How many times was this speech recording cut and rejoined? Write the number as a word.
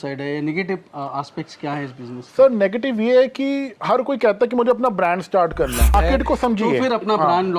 one